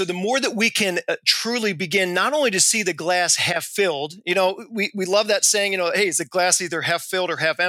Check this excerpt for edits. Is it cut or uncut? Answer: uncut